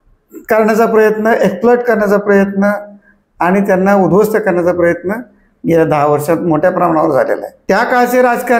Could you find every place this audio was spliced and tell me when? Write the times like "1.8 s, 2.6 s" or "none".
7.5 s